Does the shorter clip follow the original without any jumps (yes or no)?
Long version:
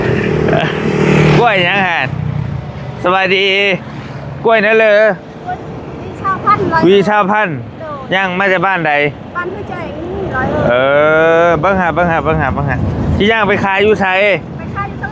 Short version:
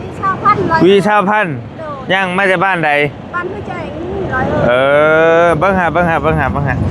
yes